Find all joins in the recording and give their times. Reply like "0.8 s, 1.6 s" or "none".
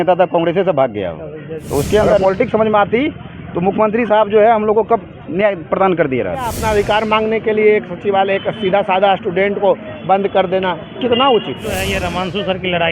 2.2 s, 6.5 s, 11.9 s